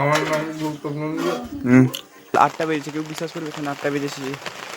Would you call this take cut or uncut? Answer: cut